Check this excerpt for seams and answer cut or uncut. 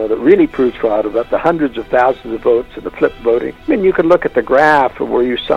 cut